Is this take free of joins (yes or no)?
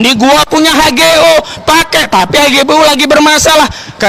yes